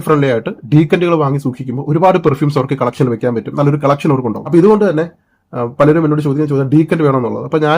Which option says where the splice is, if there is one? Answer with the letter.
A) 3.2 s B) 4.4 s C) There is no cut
B